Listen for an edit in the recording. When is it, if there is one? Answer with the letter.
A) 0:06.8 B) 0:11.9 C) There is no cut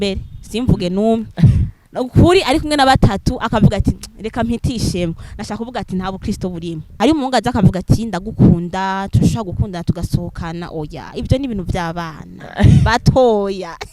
A